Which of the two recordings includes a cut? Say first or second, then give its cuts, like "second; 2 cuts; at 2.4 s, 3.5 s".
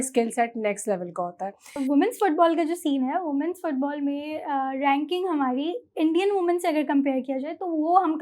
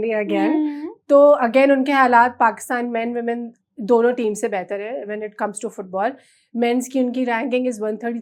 first; 1 cut; at 1.8 s